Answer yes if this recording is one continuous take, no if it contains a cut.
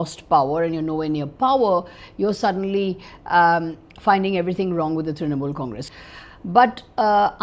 no